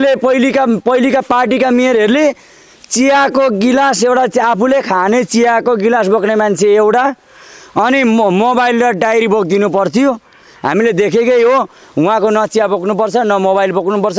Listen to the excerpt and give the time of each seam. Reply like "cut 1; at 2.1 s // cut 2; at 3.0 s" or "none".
none